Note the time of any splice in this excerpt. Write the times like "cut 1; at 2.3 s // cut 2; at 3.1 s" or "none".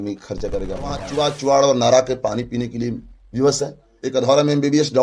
cut 1; at 1.0 s